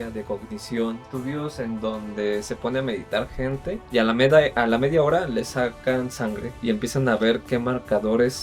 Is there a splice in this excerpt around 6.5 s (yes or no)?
yes